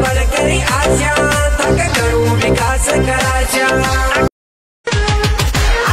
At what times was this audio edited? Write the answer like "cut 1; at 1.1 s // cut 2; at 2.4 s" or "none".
cut 1; at 4.5 s